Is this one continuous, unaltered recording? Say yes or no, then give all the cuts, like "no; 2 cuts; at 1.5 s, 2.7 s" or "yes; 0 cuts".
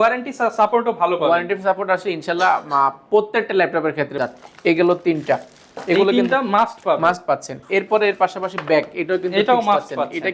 no; 1 cut; at 4.1 s